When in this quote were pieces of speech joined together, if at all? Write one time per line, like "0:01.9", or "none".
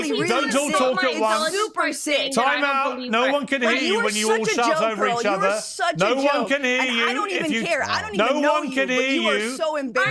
none